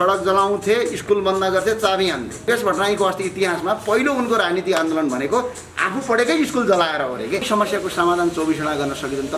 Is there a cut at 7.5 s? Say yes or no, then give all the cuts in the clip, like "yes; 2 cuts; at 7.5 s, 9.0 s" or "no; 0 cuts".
yes; 2 cuts; at 2.5 s, 7.5 s